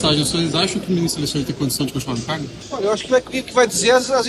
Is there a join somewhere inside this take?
yes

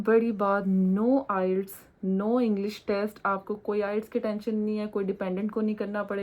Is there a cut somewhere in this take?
no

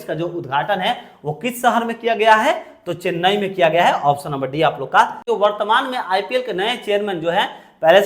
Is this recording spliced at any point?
yes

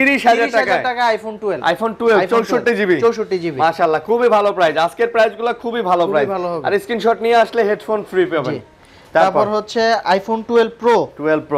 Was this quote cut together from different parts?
no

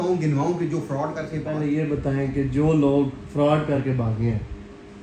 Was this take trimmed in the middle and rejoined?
yes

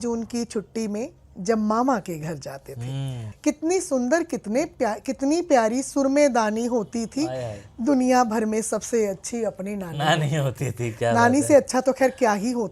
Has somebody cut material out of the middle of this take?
yes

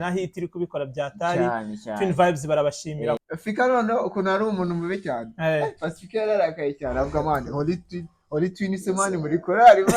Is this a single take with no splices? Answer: no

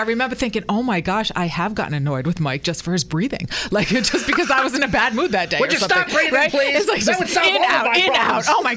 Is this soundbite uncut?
yes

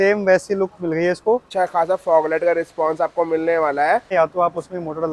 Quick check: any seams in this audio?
yes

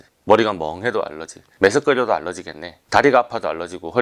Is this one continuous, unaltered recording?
no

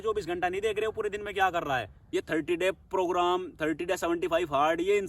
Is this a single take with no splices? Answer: no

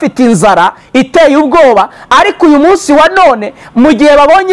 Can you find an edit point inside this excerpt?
no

